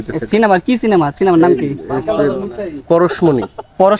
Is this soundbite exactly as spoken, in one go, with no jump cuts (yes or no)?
yes